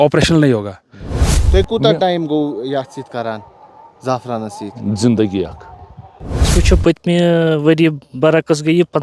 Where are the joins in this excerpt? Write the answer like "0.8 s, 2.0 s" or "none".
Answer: 1.2 s, 6.5 s